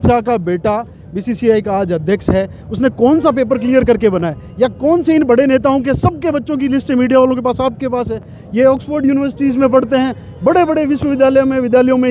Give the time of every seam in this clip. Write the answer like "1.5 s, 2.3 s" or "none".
none